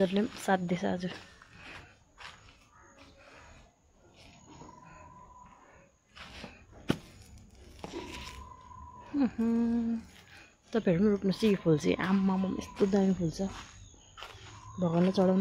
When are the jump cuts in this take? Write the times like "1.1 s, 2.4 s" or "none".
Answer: none